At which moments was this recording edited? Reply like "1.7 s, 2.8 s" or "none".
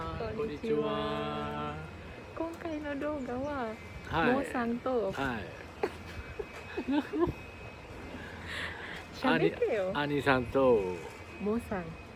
none